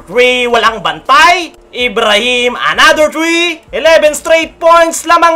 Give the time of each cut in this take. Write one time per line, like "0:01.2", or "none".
0:03.6